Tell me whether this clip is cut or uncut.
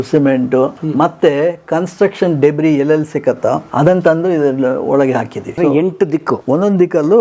cut